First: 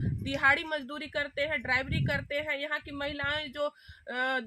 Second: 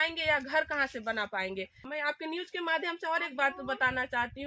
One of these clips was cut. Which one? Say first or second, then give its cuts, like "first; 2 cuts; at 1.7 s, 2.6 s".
second; 1 cut; at 1.8 s